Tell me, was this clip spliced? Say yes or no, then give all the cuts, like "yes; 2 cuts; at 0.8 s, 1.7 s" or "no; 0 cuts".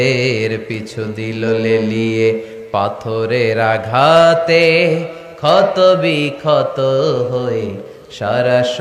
no; 0 cuts